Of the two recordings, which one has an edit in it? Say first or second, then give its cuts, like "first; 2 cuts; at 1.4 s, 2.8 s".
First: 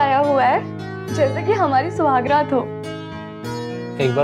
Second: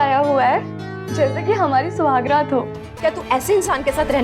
second; 1 cut; at 2.8 s